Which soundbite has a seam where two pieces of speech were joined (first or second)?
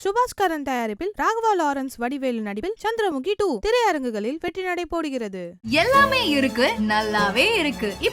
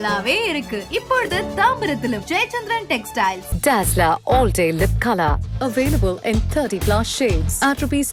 first